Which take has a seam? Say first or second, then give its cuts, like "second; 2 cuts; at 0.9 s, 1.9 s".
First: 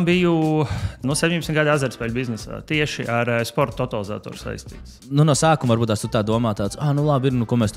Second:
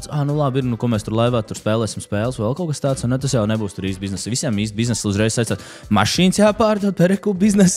first; 2 cuts; at 1.0 s, 4.9 s